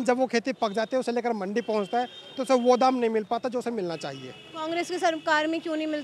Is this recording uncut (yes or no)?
yes